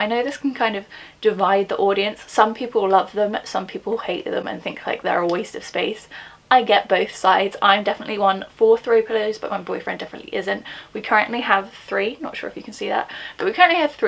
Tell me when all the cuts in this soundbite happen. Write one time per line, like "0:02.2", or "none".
none